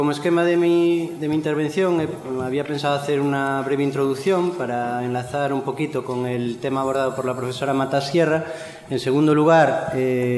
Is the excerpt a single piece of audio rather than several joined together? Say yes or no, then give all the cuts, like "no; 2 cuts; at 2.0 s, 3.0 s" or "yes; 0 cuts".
no; 1 cut; at 1.0 s